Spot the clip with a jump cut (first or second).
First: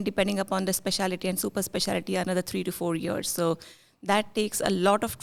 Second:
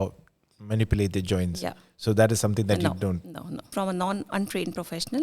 second